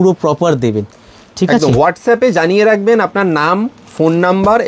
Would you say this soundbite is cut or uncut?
uncut